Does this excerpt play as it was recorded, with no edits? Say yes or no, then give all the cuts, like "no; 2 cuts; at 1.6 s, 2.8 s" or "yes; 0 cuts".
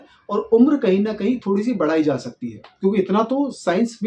yes; 0 cuts